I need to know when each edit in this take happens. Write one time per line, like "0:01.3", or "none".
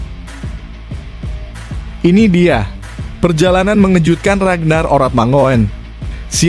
none